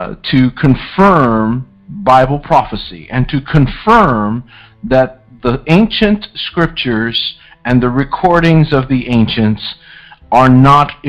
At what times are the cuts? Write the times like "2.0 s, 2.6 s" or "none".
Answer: none

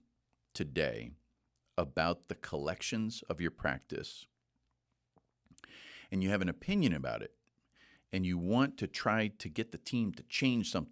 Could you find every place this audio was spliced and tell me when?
none

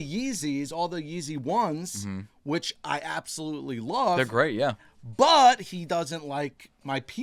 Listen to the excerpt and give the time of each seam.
none

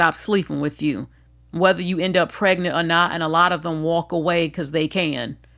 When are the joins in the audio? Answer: none

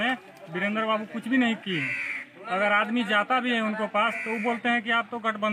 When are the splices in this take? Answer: none

